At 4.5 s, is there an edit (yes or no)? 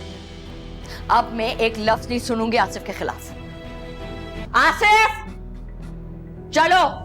yes